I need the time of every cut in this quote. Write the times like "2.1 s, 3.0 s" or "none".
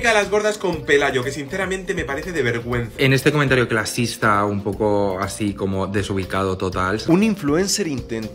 none